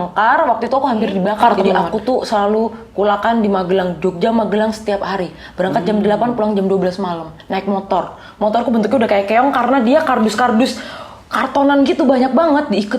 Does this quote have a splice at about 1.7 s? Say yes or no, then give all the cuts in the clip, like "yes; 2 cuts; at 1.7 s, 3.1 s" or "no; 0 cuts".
yes; 1 cut; at 1.7 s